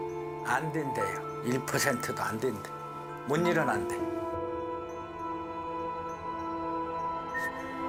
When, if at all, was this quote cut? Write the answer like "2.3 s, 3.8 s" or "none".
none